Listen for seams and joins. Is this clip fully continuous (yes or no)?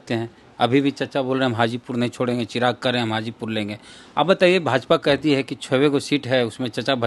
yes